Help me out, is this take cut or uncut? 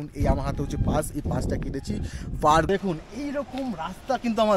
cut